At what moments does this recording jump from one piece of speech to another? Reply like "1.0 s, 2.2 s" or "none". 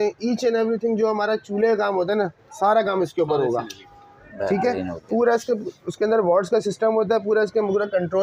none